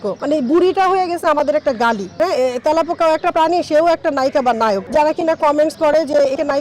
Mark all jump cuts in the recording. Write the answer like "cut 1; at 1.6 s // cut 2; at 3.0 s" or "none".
cut 1; at 2.1 s // cut 2; at 4.9 s